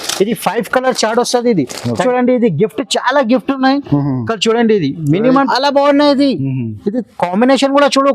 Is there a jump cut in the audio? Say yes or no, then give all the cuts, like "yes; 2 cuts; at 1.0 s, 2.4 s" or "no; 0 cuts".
yes; 2 cuts; at 2.0 s, 5.5 s